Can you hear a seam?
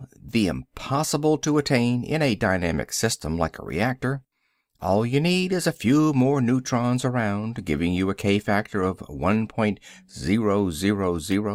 no; 0 cuts

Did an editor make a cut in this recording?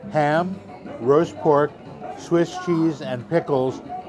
no; 0 cuts

